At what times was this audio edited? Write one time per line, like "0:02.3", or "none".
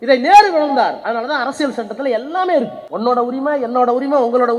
0:01.0
0:02.8